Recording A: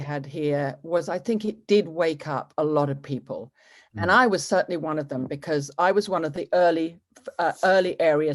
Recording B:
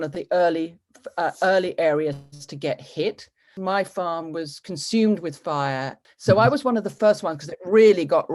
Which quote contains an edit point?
B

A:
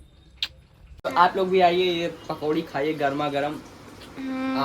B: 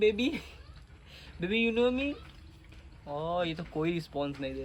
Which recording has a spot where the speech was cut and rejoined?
A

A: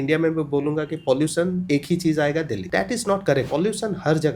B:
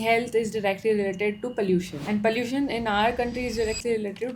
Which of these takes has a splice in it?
A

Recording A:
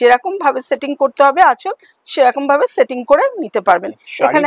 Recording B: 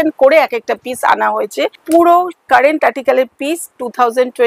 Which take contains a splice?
B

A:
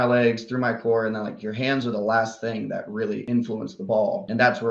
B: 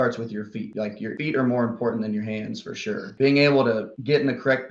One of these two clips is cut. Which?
B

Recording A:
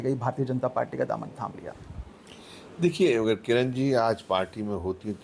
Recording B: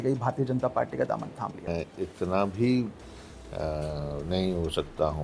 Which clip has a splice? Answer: B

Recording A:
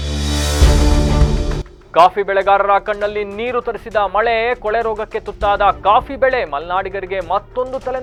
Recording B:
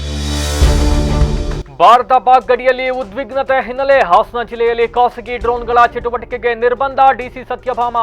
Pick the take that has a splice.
B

